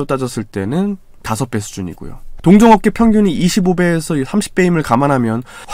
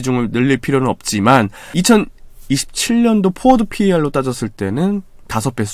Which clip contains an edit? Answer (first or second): second